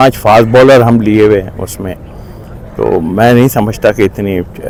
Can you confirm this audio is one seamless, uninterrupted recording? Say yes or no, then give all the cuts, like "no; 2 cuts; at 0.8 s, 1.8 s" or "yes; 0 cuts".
yes; 0 cuts